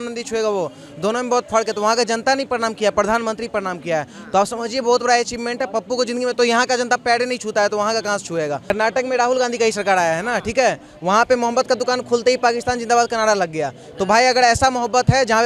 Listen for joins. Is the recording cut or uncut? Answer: uncut